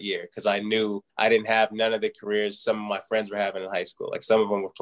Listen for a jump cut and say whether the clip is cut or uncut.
cut